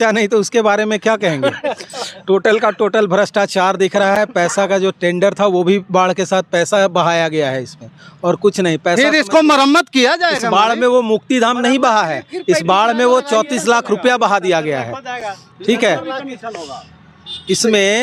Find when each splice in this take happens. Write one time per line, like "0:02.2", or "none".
none